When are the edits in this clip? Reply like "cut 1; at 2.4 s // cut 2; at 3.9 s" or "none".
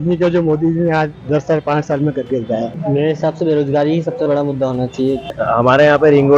cut 1; at 2.8 s // cut 2; at 5.4 s